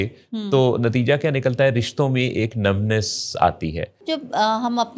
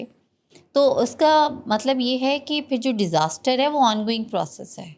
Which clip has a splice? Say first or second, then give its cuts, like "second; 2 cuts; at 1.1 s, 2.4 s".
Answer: first; 1 cut; at 4.0 s